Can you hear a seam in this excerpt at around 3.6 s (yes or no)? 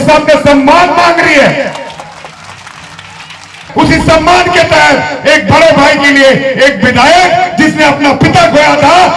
yes